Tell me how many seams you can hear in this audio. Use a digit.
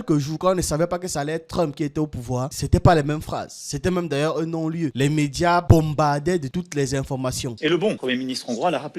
2